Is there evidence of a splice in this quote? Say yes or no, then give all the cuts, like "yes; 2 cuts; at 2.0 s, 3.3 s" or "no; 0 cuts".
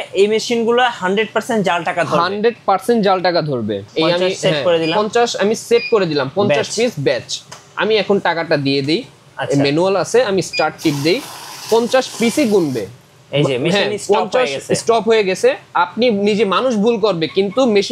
yes; 1 cut; at 3.8 s